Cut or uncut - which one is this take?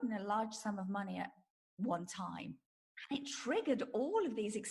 cut